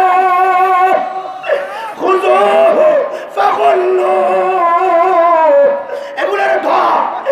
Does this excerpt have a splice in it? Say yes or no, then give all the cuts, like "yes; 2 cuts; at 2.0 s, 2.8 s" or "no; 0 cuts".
no; 0 cuts